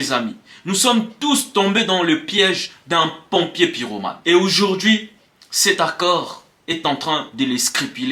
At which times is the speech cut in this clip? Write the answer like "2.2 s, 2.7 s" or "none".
none